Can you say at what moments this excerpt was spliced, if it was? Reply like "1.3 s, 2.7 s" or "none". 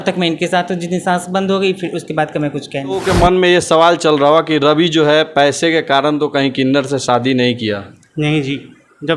3.0 s